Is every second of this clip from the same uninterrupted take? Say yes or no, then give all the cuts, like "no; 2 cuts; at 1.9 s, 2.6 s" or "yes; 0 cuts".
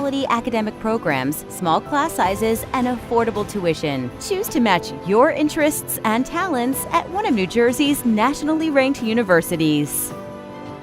no; 1 cut; at 9.9 s